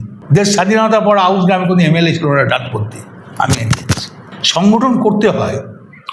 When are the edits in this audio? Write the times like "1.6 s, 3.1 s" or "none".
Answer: none